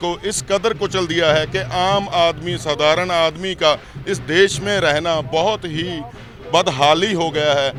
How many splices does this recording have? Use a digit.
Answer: 0